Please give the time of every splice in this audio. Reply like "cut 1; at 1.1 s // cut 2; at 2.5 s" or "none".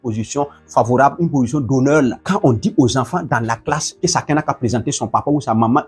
cut 1; at 2.2 s // cut 2; at 3.9 s